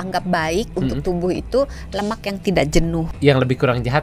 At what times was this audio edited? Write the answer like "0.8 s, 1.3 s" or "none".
3.1 s